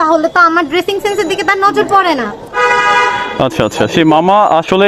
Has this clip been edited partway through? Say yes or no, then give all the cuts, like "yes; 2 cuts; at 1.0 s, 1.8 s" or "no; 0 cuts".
no; 0 cuts